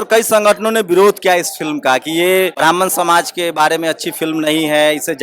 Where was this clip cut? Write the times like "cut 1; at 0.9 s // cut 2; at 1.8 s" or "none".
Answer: cut 1; at 2.5 s